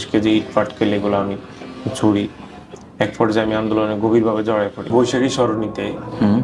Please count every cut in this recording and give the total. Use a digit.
1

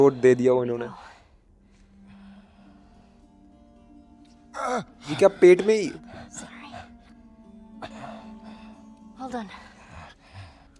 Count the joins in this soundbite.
0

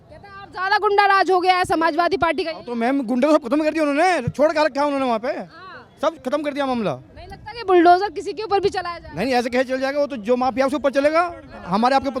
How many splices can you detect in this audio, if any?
0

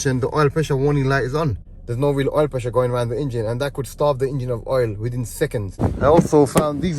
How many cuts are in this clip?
2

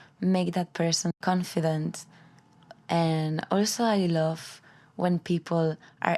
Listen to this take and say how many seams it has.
1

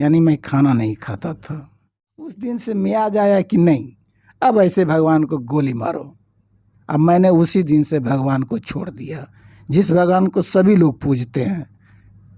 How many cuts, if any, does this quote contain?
1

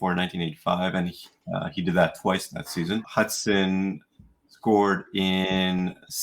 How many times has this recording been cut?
1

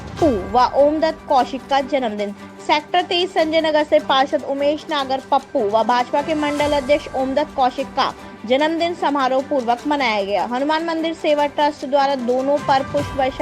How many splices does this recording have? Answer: 0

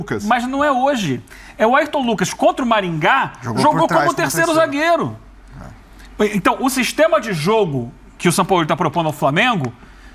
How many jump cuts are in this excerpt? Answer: 0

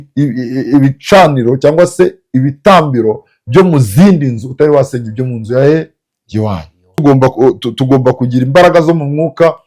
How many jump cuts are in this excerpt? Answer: 1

